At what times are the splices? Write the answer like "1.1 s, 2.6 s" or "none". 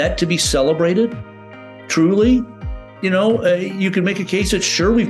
none